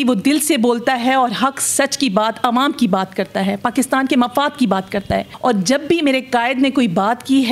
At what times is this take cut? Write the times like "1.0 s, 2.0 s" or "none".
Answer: 5.3 s